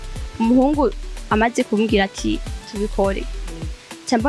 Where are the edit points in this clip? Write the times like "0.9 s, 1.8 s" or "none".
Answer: 2.6 s